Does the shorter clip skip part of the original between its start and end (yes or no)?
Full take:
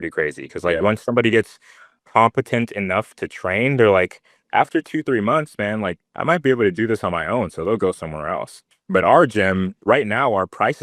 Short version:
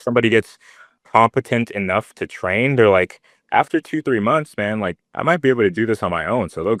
no